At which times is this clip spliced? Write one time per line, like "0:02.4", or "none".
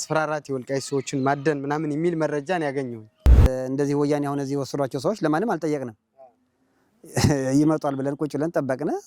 0:03.5